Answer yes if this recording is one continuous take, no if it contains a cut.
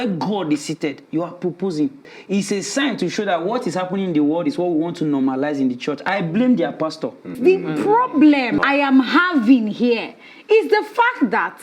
no